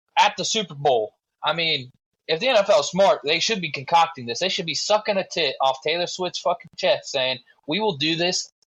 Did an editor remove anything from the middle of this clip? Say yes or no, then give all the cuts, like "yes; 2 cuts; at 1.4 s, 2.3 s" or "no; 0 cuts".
no; 0 cuts